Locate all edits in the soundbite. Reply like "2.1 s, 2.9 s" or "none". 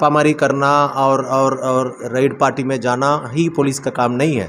none